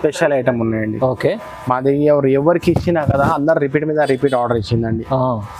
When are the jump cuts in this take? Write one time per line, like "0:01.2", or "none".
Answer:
none